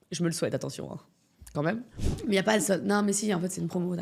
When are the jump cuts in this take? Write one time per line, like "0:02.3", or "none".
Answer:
0:01.9